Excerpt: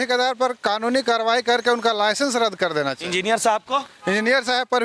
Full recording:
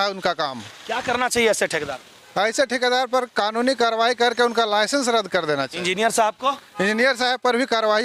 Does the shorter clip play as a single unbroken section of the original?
yes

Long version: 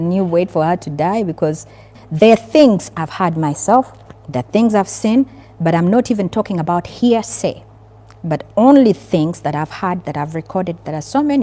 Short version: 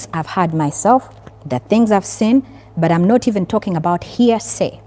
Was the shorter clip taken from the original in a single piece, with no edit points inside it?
yes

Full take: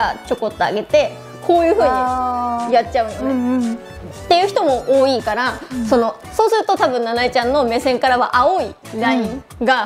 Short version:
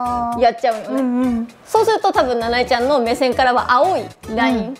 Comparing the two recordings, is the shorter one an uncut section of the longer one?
no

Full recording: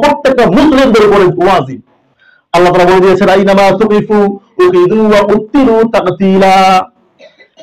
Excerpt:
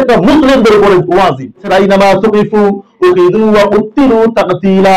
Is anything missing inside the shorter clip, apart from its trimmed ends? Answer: yes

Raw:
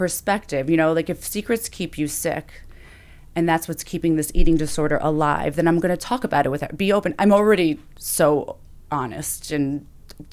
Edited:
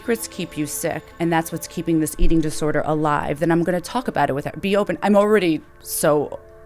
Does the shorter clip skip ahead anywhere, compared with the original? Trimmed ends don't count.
yes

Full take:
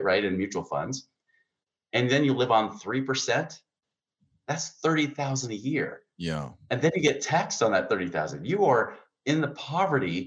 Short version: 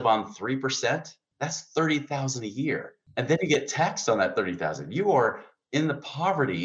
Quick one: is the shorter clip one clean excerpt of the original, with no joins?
no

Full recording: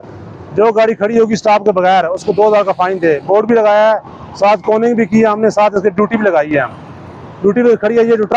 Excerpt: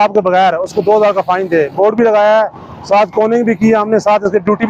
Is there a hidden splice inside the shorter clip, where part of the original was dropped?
no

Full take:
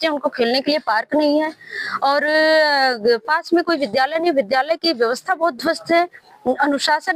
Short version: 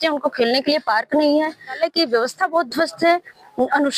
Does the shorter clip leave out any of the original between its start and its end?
yes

